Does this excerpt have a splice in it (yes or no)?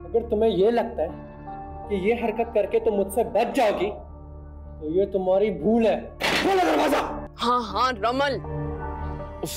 yes